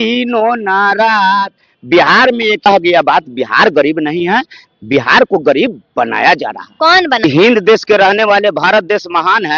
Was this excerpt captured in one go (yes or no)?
no